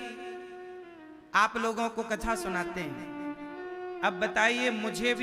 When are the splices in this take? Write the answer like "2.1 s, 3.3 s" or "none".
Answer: 3.6 s